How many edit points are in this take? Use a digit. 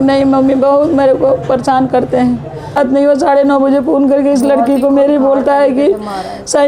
1